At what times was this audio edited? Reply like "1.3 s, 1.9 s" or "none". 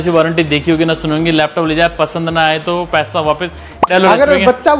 3.9 s

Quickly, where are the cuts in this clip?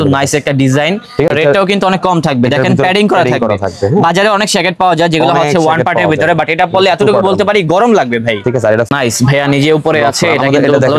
1.3 s, 8.9 s

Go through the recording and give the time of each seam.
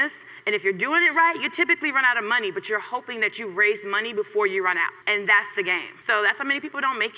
5.0 s, 5.9 s

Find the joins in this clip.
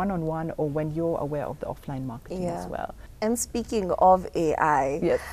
3.0 s

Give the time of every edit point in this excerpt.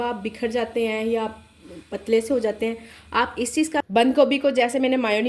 3.9 s

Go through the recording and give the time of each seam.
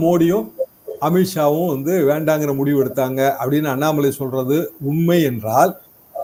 none

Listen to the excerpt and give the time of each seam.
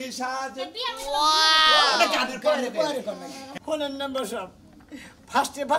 3.5 s

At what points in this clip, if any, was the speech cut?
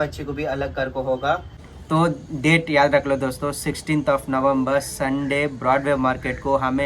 1.5 s

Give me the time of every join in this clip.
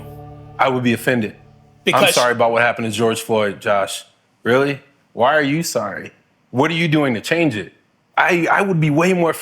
8.1 s

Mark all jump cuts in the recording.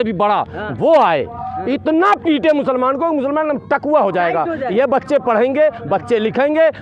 none

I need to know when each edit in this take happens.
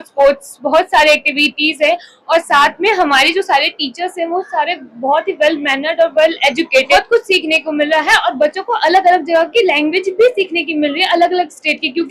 none

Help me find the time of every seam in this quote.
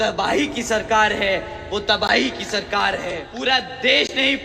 3.3 s

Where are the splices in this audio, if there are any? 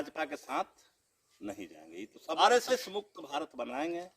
2.4 s

